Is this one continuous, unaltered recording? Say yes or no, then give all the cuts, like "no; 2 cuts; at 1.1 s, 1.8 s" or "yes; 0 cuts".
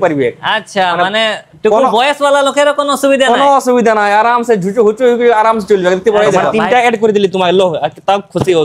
no; 1 cut; at 6.6 s